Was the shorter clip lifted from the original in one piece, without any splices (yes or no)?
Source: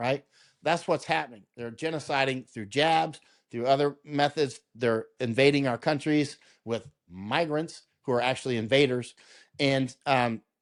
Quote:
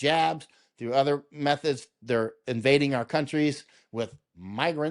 yes